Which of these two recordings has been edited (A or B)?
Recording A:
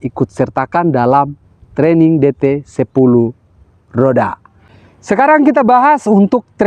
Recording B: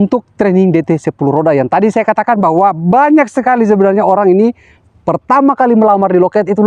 A